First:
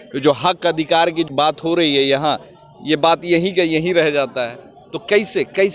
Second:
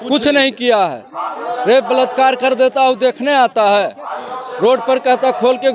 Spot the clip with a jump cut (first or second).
first